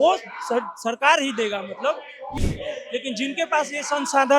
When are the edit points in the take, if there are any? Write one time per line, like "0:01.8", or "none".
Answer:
0:02.4